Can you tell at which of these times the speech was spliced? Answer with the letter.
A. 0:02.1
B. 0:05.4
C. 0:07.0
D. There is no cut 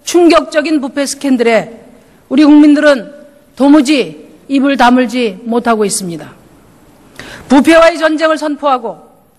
A